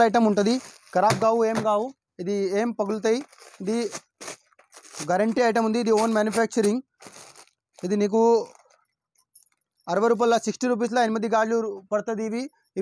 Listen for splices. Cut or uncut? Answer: uncut